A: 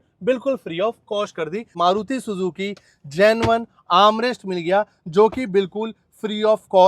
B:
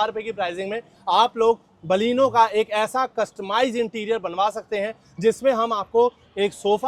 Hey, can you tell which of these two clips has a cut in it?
A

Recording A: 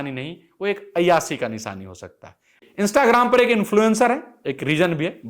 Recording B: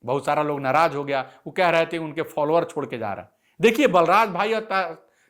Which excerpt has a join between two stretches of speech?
A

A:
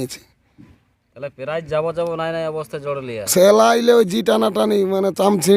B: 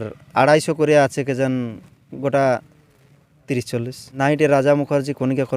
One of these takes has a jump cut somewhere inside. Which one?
B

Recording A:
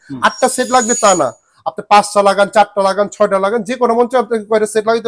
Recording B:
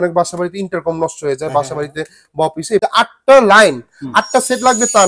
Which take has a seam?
B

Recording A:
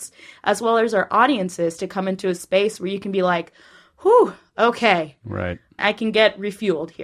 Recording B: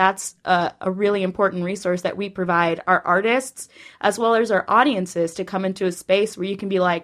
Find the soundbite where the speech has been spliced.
A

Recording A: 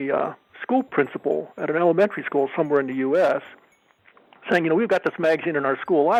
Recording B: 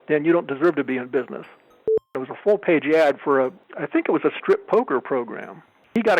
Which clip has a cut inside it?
B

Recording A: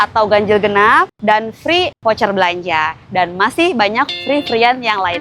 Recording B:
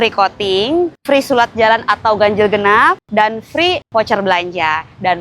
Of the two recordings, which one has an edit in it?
B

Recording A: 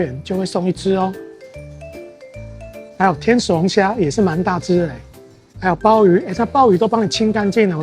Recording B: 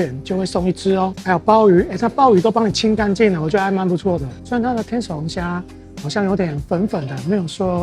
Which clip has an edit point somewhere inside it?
B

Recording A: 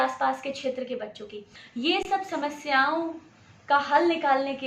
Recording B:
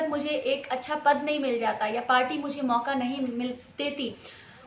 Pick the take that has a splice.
A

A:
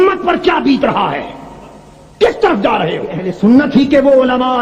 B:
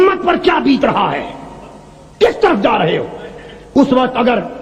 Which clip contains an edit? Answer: A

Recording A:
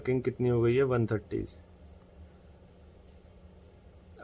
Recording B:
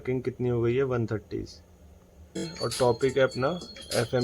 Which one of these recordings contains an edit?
B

